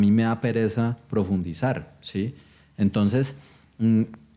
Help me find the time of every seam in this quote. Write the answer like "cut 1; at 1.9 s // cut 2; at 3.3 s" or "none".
none